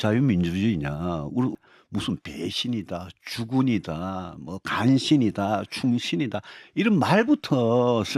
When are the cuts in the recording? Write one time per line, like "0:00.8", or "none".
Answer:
0:01.5